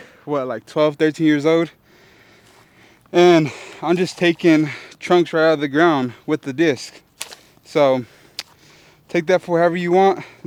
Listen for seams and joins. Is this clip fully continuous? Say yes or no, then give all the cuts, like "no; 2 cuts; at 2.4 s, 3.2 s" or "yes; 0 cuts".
yes; 0 cuts